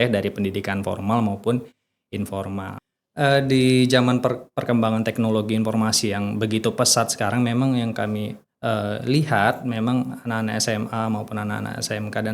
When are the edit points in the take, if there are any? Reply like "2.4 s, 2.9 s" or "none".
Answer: 2.8 s